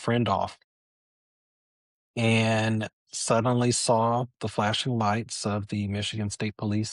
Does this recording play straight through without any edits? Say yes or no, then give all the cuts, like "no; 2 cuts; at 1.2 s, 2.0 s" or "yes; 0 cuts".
yes; 0 cuts